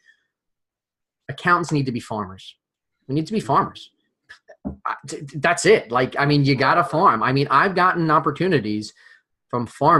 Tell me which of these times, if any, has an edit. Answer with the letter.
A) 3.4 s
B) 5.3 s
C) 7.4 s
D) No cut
D